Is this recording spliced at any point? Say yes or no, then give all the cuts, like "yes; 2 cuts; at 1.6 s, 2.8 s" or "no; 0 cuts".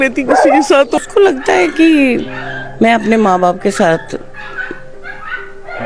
yes; 1 cut; at 1.0 s